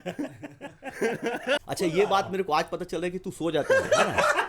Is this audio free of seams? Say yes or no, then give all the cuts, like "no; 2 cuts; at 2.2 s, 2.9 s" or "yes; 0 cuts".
no; 1 cut; at 1.6 s